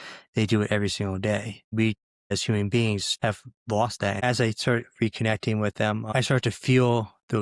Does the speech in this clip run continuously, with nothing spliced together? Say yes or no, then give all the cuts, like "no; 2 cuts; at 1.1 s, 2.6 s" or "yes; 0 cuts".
no; 4 cuts; at 1.8 s, 3.1 s, 4.2 s, 6.1 s